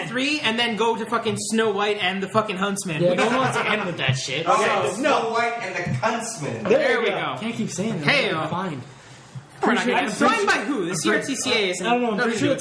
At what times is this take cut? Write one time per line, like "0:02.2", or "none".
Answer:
0:11.4